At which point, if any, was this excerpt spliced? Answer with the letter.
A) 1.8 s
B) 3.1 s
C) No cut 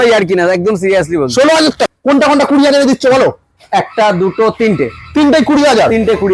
A